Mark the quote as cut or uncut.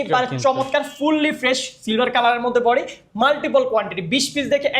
uncut